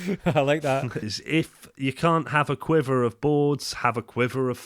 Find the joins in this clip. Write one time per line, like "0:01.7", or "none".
0:01.1